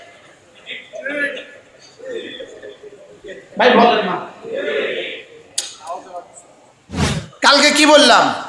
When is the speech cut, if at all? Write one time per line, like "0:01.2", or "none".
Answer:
0:07.1